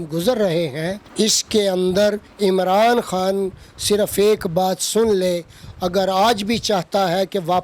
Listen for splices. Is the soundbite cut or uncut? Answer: cut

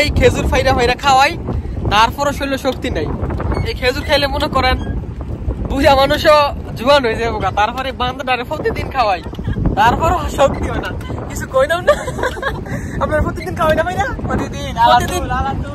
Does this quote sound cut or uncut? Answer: uncut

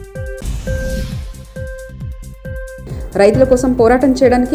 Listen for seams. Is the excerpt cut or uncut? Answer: cut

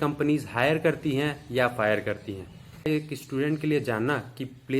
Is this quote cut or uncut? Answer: cut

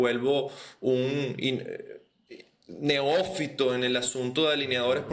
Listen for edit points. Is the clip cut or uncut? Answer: uncut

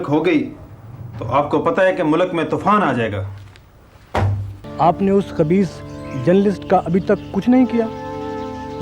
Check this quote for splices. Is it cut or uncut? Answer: cut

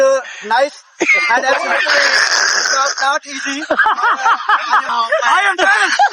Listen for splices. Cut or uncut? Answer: cut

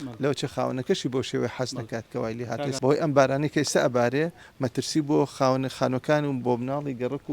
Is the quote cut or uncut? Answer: cut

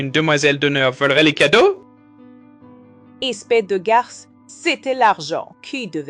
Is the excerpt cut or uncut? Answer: uncut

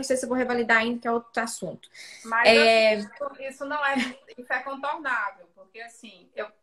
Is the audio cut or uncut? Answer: cut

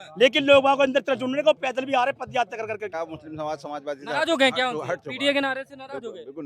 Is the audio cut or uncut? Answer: cut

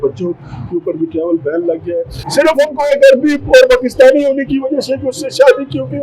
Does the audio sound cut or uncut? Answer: cut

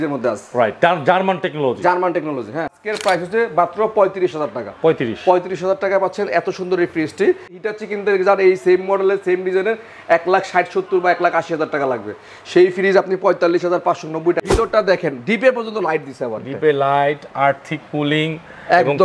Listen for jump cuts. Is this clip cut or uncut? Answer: cut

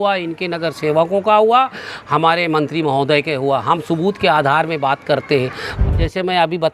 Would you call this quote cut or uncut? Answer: cut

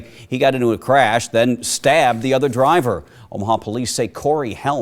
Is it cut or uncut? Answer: uncut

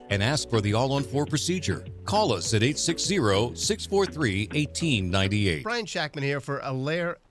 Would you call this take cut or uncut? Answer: uncut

